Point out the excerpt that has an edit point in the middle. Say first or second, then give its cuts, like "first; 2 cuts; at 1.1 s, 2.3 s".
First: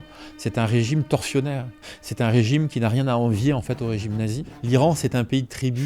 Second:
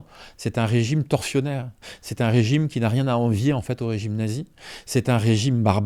first; 1 cut; at 4.5 s